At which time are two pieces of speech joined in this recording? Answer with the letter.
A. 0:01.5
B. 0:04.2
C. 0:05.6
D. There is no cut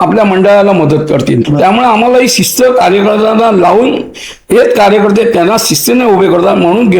A